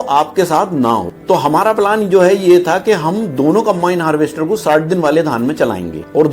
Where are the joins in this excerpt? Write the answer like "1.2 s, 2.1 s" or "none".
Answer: 1.1 s